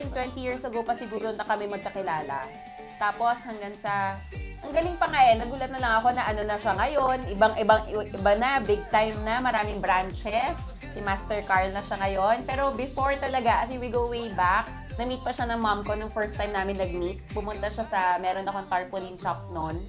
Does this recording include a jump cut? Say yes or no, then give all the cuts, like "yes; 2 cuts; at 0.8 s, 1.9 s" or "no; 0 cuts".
no; 0 cuts